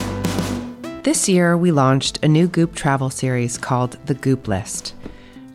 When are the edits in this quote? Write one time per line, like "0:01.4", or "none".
0:01.0

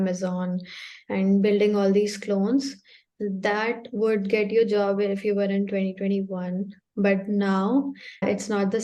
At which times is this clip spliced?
none

